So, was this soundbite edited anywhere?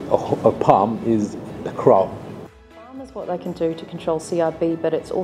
yes; 1 cut; at 2.3 s

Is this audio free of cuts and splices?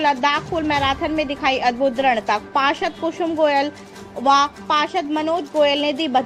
yes; 0 cuts

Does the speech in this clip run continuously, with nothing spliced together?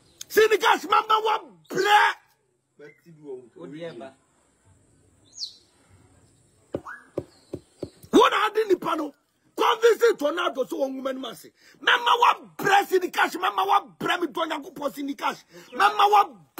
yes; 0 cuts

